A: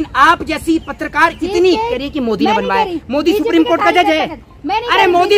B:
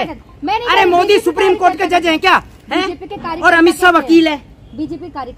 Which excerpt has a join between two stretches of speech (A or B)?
A